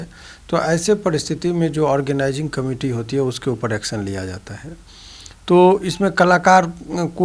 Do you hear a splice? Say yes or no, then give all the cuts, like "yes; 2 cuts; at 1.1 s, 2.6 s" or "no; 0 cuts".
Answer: no; 0 cuts